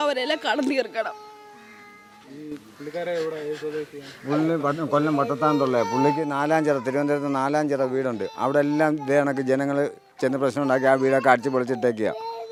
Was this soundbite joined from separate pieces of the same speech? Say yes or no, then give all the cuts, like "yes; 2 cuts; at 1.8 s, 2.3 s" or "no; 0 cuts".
no; 0 cuts